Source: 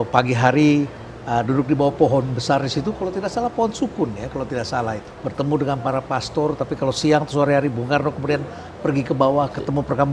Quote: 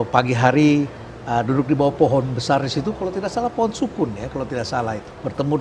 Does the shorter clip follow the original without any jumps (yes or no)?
yes